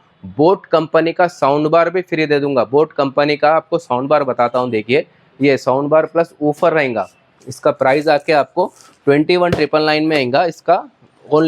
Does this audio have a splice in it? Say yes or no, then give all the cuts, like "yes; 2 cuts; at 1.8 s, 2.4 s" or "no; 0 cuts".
no; 0 cuts